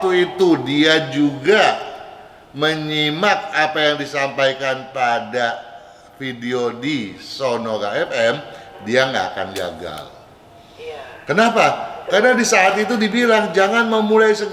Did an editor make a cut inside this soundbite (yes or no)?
no